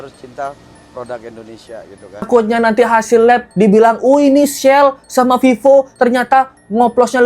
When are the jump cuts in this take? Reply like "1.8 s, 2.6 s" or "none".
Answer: 2.3 s